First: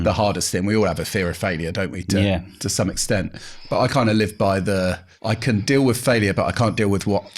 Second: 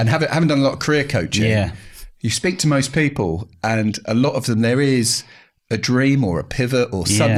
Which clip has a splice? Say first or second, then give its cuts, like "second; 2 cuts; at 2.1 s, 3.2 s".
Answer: first; 1 cut; at 5.1 s